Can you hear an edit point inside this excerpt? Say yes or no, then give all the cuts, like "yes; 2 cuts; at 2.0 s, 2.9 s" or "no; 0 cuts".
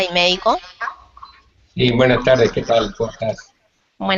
yes; 1 cut; at 2.0 s